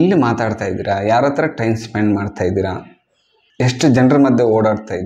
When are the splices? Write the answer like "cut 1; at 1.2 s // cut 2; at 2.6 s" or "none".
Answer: none